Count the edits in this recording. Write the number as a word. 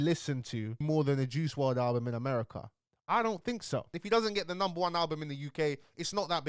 one